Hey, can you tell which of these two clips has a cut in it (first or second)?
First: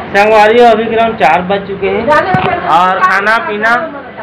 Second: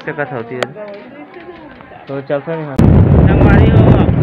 second